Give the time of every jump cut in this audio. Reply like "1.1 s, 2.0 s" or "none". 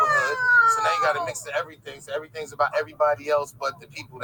none